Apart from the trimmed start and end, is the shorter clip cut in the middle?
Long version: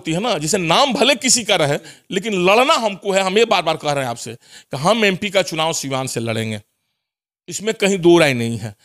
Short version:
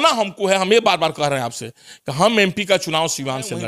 no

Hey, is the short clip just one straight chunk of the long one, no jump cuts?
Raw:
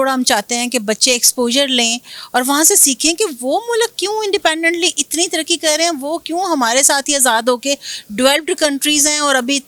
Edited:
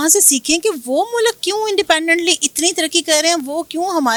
yes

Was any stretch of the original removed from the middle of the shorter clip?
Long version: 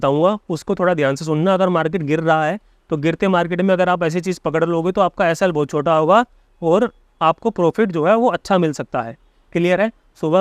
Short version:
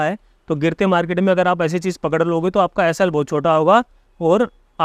no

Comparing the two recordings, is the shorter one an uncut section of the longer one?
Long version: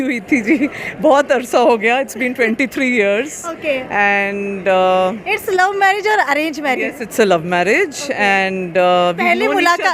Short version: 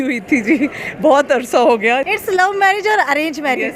no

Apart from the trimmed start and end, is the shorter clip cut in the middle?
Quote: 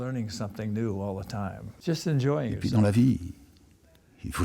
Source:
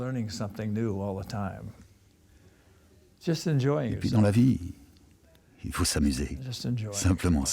yes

